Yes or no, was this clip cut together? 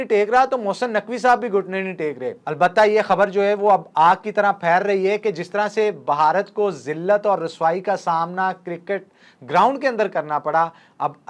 yes